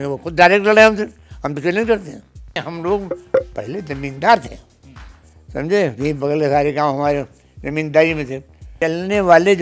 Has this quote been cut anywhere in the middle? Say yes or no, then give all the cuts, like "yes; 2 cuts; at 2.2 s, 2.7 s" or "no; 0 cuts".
yes; 2 cuts; at 2.6 s, 8.6 s